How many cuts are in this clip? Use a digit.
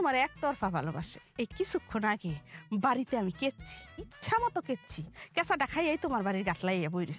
1